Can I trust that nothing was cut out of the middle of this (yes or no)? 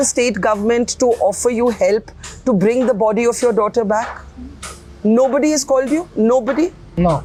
yes